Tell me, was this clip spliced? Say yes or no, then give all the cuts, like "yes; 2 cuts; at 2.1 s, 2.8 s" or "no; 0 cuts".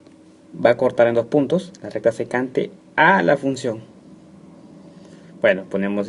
yes; 1 cut; at 1.3 s